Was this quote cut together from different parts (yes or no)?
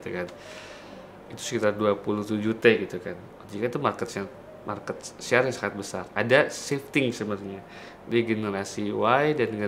yes